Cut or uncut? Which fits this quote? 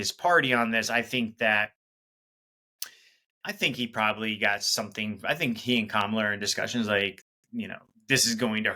uncut